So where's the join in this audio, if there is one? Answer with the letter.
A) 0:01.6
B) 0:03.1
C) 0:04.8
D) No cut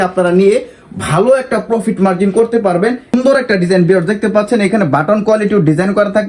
B